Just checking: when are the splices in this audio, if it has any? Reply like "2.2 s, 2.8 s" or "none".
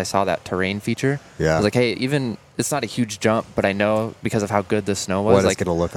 none